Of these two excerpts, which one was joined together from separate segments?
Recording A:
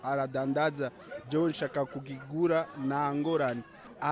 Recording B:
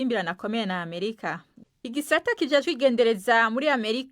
B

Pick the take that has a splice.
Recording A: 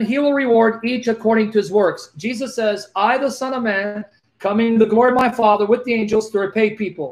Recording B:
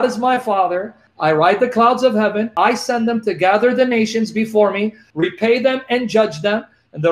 B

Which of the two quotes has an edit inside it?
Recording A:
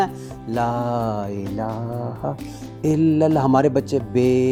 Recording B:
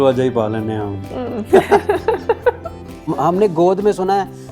B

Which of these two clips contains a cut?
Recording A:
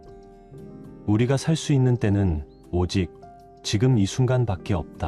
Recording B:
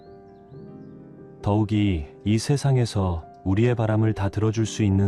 A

